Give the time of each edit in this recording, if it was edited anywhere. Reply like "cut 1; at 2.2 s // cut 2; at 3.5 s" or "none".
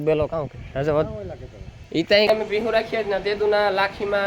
cut 1; at 2.3 s